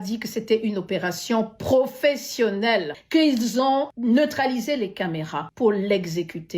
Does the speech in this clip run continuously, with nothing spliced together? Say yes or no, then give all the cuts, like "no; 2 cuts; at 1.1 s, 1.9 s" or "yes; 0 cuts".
no; 3 cuts; at 3.0 s, 3.9 s, 5.4 s